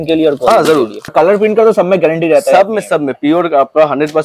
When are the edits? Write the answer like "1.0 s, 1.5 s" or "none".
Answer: 1.1 s